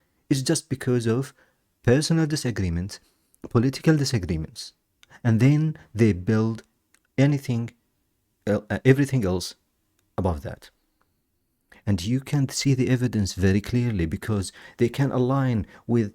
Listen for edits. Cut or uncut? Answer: uncut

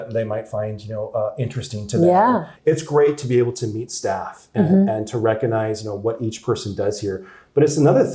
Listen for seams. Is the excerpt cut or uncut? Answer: cut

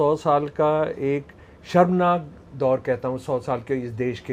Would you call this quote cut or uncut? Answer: uncut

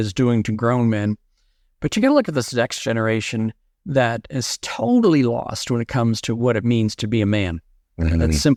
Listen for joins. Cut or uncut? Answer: uncut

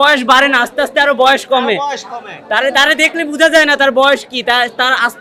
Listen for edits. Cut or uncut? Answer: uncut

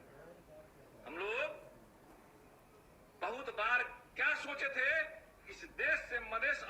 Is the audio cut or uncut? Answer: uncut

